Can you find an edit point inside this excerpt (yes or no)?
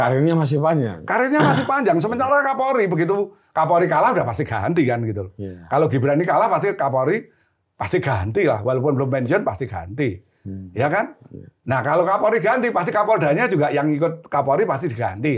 no